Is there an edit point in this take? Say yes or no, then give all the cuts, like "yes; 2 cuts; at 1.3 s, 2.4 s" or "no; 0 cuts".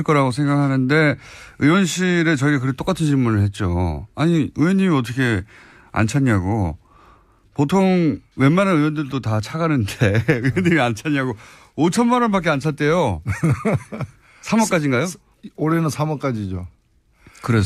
yes; 1 cut; at 5.3 s